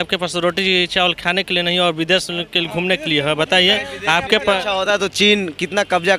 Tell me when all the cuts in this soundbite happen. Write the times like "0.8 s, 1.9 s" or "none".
none